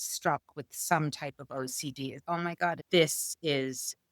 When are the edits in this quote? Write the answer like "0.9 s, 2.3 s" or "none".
2.8 s